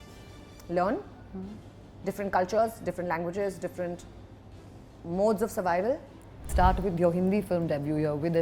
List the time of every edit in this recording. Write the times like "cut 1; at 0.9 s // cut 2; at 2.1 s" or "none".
cut 1; at 6.5 s

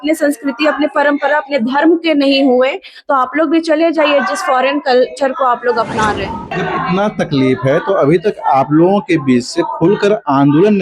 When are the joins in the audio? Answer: cut 1; at 6.6 s

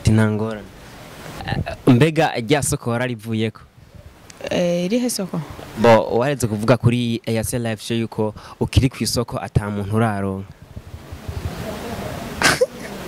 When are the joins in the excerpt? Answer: cut 1; at 1.4 s

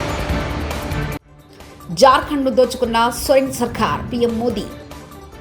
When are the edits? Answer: cut 1; at 0.9 s // cut 2; at 1.8 s // cut 3; at 4.7 s

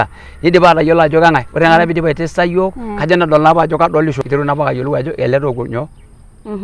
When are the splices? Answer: cut 1; at 4.2 s

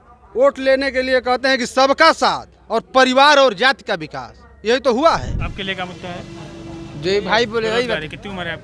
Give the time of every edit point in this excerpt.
cut 1; at 5.4 s

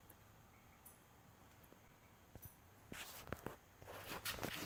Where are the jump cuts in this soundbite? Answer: none

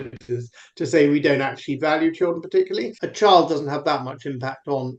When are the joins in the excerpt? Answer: cut 1; at 3.0 s

